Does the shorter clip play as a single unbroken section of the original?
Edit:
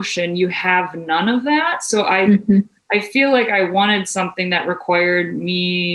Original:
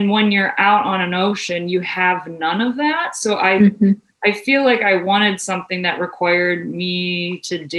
yes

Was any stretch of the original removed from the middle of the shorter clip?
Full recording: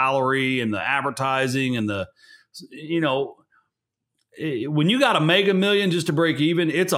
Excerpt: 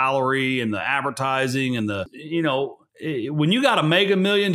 yes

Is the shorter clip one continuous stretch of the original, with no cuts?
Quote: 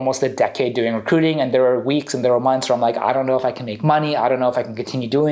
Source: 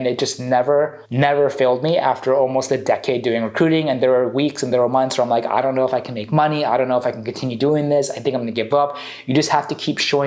yes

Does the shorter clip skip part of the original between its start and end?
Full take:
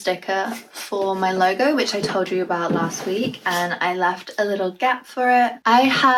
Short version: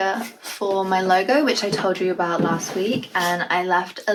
no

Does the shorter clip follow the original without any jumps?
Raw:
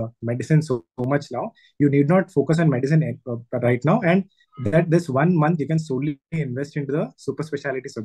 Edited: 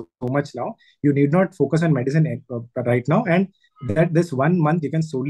yes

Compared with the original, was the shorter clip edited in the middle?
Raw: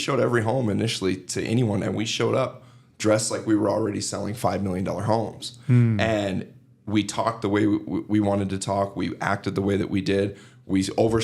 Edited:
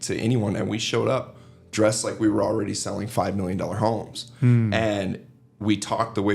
no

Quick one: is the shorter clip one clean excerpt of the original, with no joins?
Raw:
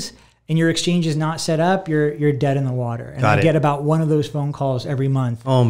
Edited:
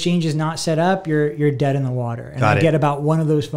yes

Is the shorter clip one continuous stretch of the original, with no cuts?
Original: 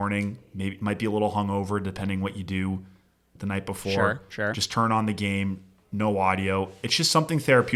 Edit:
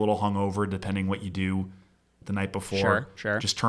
yes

